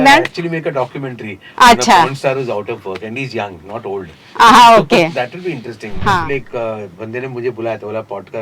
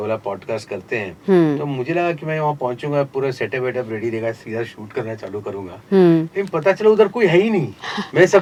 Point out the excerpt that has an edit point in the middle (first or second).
first